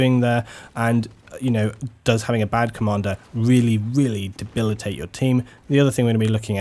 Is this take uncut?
no; 1 cut; at 1.5 s

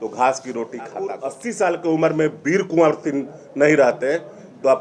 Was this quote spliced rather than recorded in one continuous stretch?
yes; 1 cut; at 1.3 s

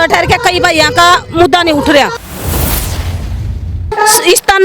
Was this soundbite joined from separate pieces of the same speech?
yes; 2 cuts; at 2.2 s, 3.9 s

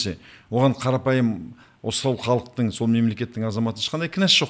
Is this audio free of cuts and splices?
yes; 0 cuts

